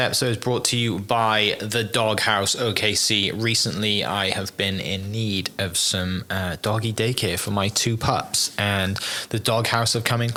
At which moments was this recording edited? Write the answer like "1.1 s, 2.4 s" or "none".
none